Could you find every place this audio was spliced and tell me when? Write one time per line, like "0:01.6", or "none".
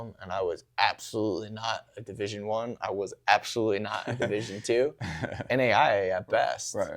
0:05.4